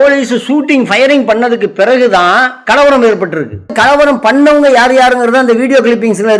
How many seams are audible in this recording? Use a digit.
1